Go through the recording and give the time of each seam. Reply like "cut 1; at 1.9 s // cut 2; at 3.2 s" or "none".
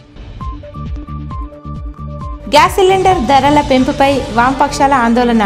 none